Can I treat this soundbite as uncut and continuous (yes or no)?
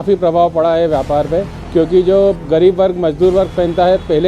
no